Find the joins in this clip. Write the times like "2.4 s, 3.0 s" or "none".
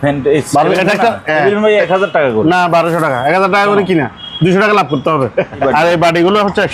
5.6 s